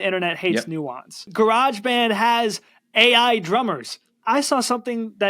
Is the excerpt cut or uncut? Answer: cut